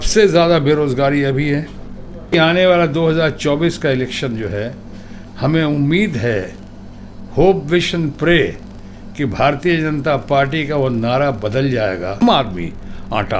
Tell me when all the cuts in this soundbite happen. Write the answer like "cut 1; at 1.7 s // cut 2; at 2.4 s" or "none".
cut 1; at 2.3 s // cut 2; at 12.2 s